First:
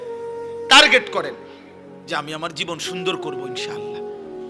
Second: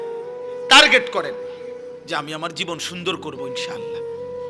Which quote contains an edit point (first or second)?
second